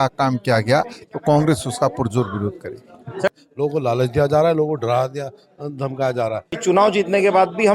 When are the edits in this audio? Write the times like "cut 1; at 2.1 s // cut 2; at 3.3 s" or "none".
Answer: cut 1; at 3.3 s // cut 2; at 6.5 s